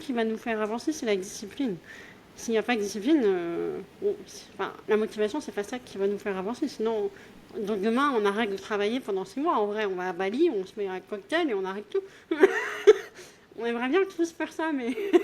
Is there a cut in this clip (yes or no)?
no